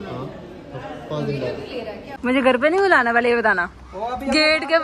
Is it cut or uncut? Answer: cut